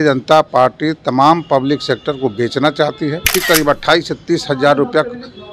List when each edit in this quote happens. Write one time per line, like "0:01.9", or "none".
0:03.3